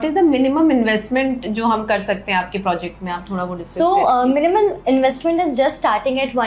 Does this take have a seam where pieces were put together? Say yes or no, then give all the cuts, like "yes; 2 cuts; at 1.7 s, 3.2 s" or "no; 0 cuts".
no; 0 cuts